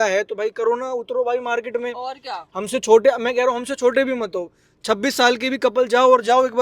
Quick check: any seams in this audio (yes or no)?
no